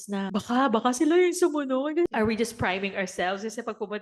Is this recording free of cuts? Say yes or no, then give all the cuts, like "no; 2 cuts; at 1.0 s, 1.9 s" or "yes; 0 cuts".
no; 1 cut; at 2.1 s